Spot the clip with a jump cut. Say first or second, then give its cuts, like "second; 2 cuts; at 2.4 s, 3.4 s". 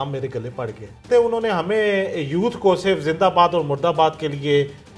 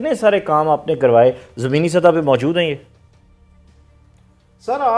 first; 1 cut; at 1.1 s